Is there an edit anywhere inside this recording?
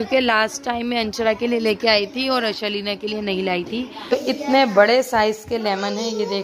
yes; 1 cut; at 4.1 s

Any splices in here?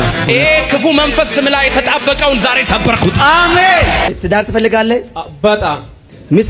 yes; 1 cut; at 4.1 s

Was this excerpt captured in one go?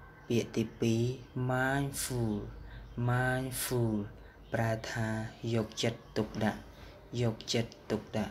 yes; 0 cuts

